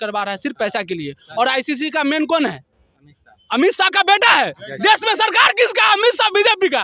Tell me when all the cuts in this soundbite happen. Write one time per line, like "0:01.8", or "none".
none

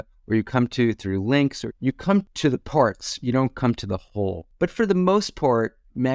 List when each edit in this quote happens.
0:02.3
0:04.4

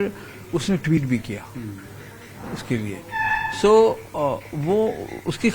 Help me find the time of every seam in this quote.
none

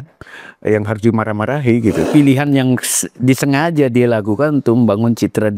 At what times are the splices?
0:02.0

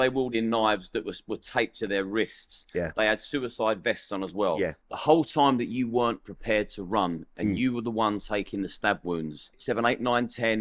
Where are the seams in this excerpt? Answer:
0:04.8
0:09.6

